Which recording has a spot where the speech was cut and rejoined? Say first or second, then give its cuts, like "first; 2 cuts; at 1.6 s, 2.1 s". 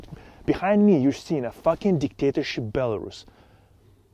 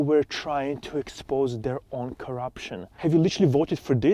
second; 1 cut; at 2.8 s